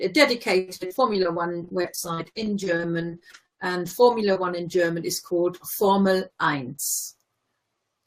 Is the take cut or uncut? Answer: uncut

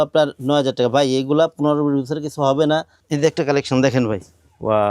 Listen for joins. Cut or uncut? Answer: cut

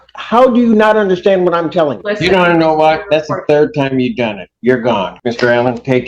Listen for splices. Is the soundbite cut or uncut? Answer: cut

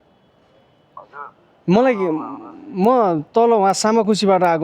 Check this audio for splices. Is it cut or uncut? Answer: uncut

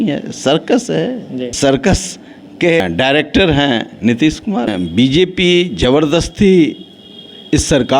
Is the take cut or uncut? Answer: cut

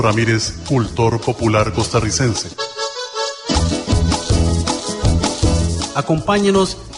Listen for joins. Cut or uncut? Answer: cut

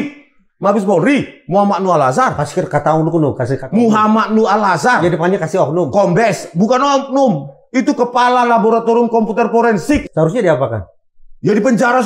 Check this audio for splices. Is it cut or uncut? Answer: cut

